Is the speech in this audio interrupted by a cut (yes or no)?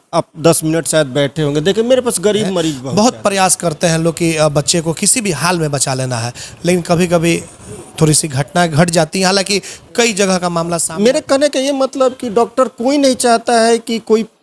yes